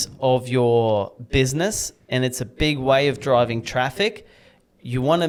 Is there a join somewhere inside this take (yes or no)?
no